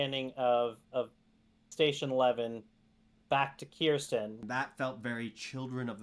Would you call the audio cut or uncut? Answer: cut